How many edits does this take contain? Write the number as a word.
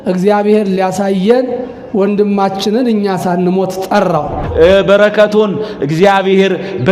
one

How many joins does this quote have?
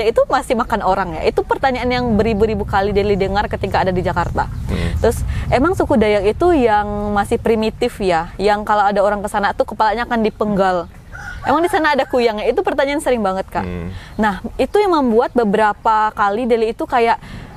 zero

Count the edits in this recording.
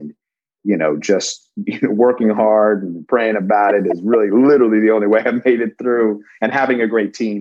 zero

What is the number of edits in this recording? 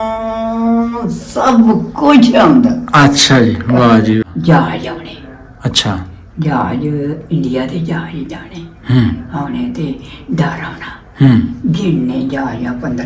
one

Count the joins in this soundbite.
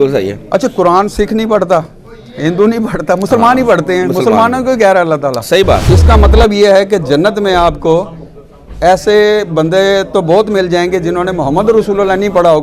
one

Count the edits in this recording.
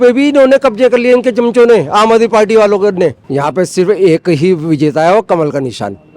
one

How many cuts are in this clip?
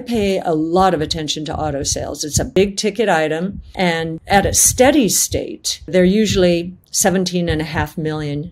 three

